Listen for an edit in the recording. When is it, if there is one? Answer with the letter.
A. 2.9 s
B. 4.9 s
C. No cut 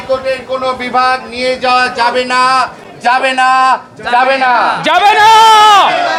C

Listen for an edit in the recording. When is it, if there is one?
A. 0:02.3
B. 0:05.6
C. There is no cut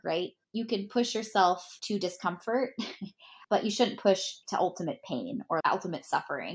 B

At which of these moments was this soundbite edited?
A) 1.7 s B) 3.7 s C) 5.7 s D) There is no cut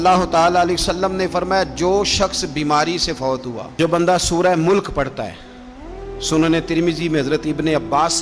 B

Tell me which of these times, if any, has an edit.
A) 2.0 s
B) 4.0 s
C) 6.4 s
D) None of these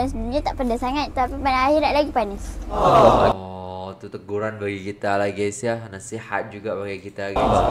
D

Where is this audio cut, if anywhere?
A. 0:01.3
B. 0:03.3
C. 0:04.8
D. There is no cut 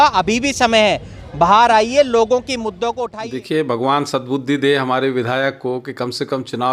B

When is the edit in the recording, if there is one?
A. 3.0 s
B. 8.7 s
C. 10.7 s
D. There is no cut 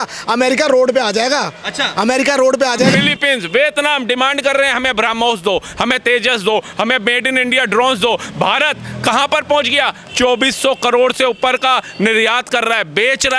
A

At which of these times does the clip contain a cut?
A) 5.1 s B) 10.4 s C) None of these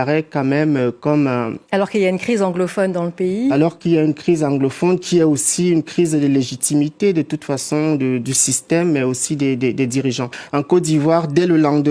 B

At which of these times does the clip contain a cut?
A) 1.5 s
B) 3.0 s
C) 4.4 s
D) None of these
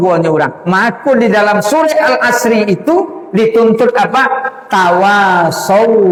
D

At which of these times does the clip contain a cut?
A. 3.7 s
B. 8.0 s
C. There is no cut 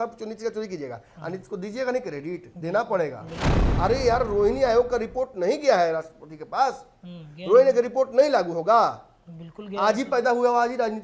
A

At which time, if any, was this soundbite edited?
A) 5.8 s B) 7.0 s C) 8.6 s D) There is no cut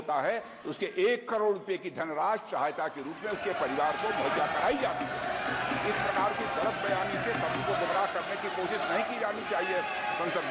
D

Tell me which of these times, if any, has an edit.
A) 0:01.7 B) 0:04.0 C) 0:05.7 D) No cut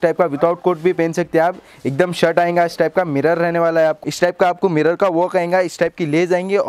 B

